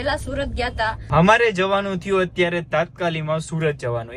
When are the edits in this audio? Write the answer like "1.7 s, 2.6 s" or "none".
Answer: 1.0 s